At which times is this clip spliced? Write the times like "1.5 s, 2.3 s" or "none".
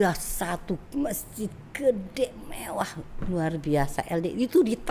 none